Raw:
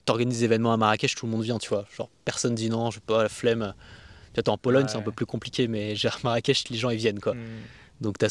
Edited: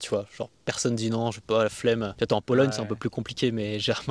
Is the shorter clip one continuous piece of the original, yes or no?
no